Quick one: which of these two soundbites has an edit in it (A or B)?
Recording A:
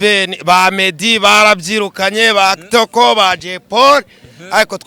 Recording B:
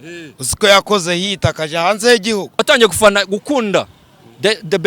B